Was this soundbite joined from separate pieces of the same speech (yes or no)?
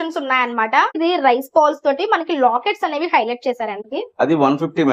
yes